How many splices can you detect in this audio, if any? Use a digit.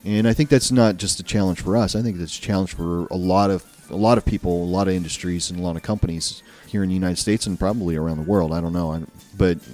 0